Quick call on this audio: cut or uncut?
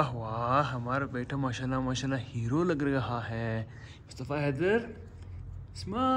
uncut